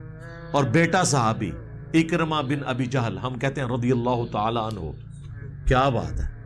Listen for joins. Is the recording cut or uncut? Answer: uncut